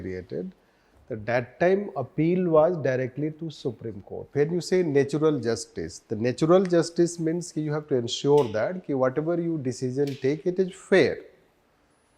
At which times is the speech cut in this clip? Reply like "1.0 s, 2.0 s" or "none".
4.3 s